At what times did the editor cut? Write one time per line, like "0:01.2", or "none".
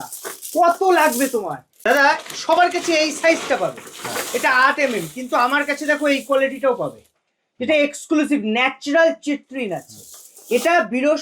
0:01.7

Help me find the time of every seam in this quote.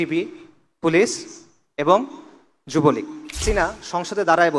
0:03.4

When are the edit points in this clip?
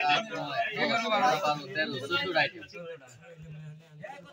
none

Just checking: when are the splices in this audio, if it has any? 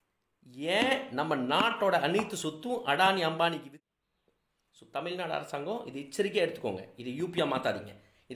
0:03.7

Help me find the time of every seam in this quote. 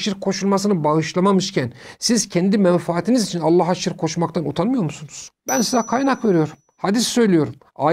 0:05.3

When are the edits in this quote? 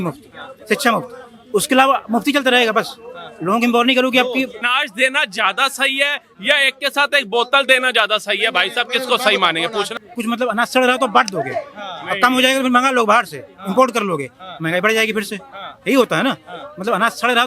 0:04.6
0:10.0

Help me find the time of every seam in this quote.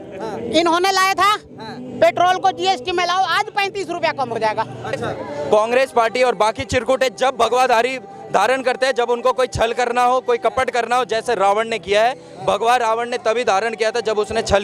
0:05.1

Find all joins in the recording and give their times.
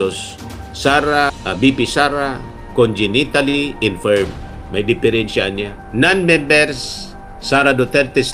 0:05.8

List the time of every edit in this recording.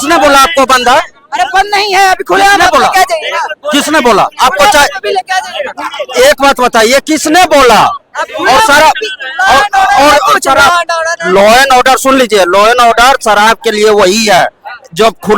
none

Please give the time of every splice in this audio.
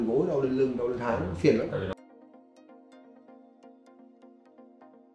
0:01.9

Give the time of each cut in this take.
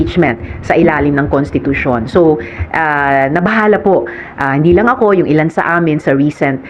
none

